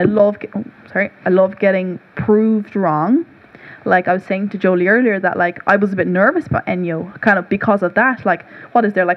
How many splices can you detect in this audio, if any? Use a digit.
0